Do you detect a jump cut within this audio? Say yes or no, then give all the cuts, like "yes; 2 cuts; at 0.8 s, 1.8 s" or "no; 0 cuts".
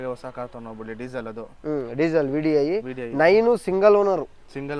no; 0 cuts